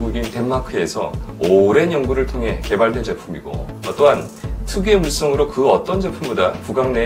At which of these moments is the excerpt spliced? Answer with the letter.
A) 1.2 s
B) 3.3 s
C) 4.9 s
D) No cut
A